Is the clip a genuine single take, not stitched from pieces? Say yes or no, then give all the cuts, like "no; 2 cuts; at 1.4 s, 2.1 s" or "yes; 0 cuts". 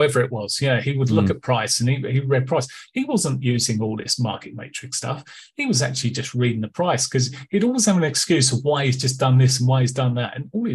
yes; 0 cuts